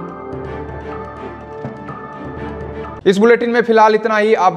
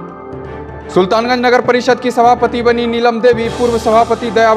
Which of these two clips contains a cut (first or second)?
second